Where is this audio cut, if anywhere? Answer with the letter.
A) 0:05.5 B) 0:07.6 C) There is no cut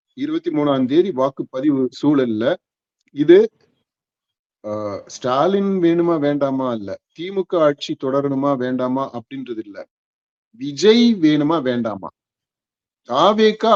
C